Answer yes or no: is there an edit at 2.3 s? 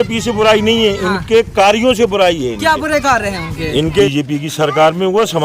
no